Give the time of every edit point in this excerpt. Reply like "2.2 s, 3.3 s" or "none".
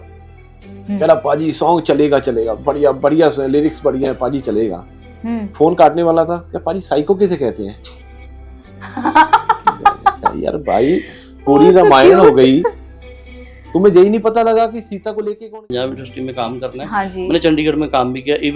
15.5 s

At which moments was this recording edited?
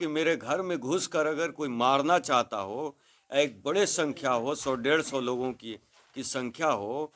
none

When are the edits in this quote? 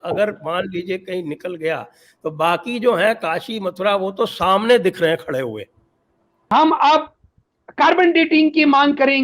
6.5 s

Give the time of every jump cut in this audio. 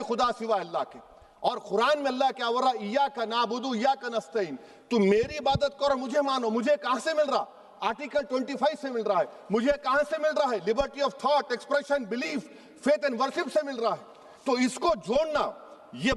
none

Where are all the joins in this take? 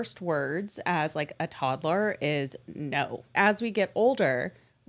3.3 s

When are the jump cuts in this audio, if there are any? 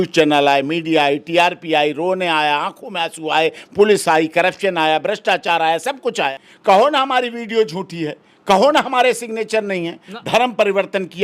6.4 s, 10.1 s

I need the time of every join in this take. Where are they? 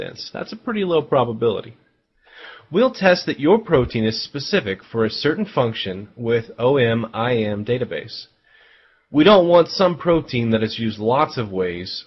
4.7 s

